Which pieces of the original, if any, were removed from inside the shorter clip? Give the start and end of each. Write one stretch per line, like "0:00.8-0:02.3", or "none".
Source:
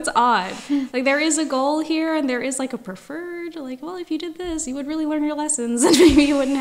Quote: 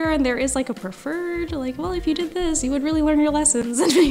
none

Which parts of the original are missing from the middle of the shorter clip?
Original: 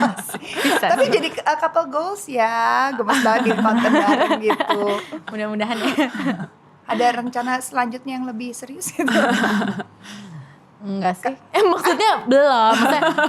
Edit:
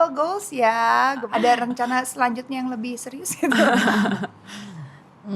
0:03.0-0:06.8

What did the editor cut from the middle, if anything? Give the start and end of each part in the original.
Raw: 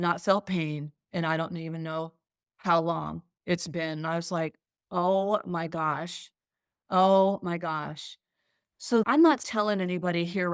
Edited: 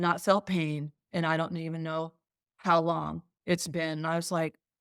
none

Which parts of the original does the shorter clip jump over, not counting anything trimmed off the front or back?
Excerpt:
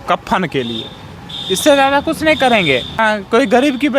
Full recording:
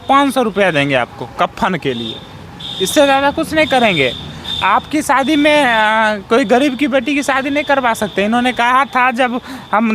0:04.3-0:06.0

